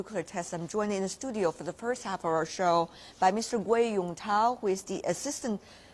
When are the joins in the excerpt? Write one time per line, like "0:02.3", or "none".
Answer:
0:02.1